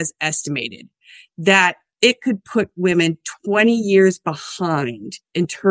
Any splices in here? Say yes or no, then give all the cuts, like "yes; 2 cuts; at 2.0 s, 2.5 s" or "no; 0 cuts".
yes; 1 cut; at 1.8 s